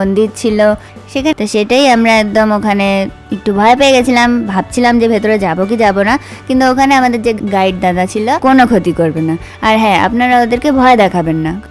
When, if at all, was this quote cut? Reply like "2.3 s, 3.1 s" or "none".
1.3 s, 8.4 s